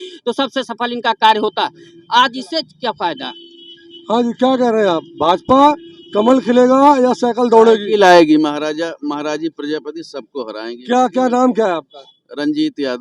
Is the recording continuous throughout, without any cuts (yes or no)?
yes